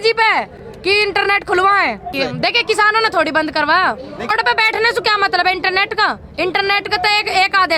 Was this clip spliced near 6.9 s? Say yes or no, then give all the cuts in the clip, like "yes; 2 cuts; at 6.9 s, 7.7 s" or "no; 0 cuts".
no; 2 cuts; at 2.1 s, 4.3 s